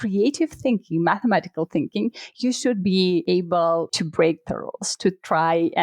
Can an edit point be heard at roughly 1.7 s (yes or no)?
no